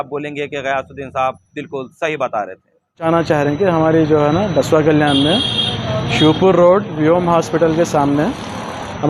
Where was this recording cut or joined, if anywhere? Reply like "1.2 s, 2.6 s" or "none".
3.1 s